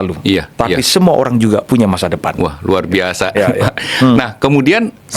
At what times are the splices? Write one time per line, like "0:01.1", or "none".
none